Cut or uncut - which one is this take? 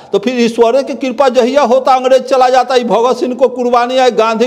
uncut